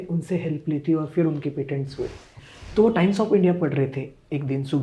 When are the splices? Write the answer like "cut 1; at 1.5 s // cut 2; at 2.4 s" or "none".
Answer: cut 1; at 2.3 s